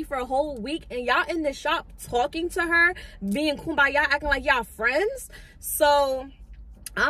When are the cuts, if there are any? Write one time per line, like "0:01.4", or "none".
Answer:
none